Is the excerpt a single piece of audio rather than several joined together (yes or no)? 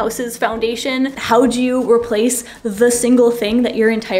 no